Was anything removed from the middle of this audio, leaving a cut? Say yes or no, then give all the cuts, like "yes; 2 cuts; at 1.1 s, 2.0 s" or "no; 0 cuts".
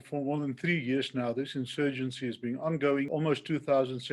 yes; 1 cut; at 3.1 s